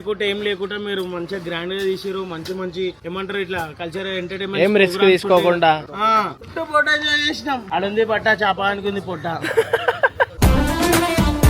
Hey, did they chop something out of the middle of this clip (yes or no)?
yes